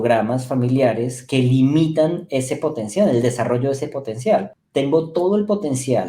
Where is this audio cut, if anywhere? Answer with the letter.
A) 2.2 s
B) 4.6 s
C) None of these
B